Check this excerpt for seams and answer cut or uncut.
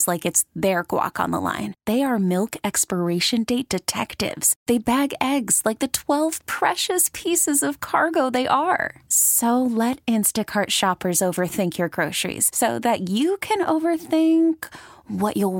uncut